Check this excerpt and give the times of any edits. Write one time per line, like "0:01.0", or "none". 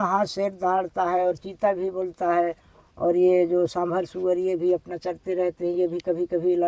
none